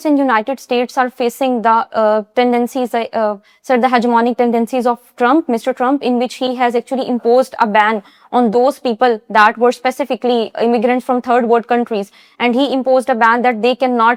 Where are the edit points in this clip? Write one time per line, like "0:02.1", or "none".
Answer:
none